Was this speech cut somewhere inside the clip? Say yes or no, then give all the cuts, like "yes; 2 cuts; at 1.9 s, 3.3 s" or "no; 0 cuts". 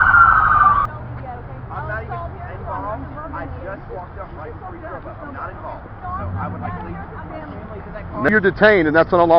yes; 2 cuts; at 0.9 s, 8.3 s